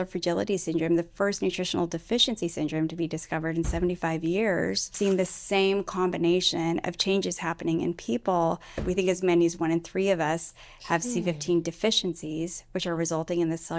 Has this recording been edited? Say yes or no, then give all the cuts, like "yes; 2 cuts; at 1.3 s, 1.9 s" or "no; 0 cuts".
yes; 2 cuts; at 4.9 s, 8.7 s